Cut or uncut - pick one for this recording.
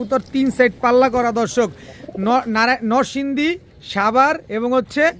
uncut